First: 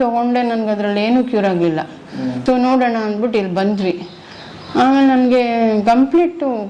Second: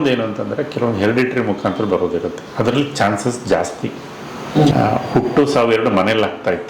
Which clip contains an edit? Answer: second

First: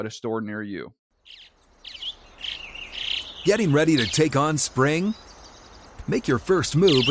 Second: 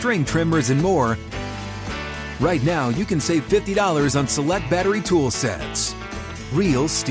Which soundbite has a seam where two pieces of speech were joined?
first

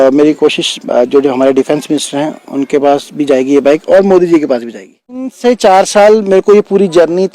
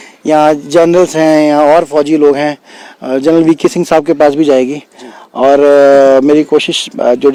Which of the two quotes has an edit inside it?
first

